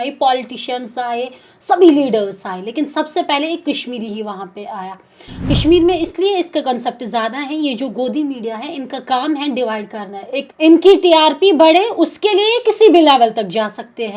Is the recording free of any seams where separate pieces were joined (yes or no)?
no